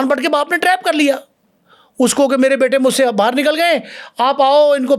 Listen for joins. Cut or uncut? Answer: uncut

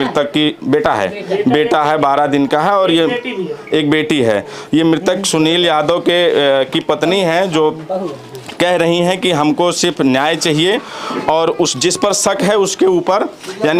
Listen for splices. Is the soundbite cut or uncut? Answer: uncut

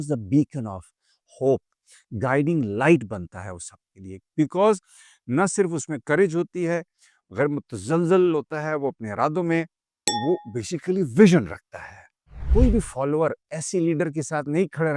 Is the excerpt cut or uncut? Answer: cut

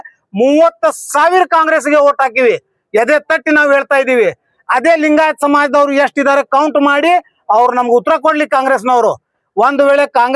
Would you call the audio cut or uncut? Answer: uncut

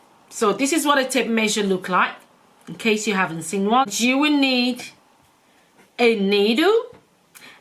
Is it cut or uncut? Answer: cut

